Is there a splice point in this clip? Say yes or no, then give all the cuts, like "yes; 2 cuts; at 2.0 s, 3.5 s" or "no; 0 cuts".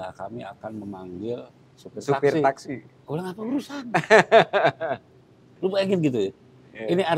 yes; 1 cut; at 2.9 s